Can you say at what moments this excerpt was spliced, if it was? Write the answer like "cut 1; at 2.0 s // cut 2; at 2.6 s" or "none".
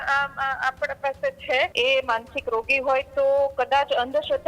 cut 1; at 1.7 s